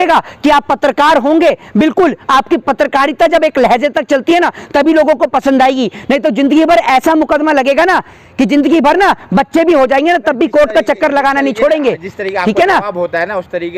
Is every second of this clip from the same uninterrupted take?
yes; 0 cuts

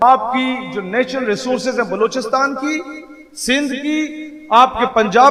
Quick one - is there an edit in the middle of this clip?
no; 0 cuts

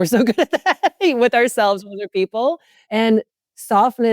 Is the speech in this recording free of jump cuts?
no; 1 cut; at 2.8 s

